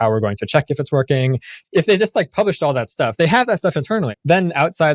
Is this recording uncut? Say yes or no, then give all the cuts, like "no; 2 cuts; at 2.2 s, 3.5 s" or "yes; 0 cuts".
no; 2 cuts; at 1.6 s, 4.1 s